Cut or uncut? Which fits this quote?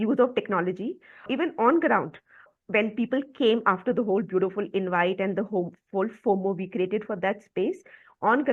cut